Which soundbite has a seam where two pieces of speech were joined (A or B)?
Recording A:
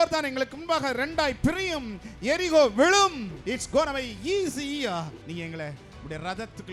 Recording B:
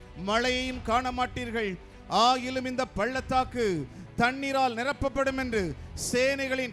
A